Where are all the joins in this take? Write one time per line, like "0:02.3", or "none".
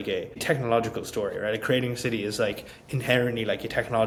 none